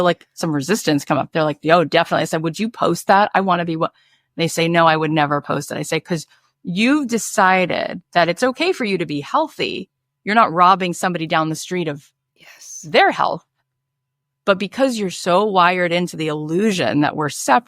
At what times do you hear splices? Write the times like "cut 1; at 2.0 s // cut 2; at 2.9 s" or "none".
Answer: cut 1; at 15.2 s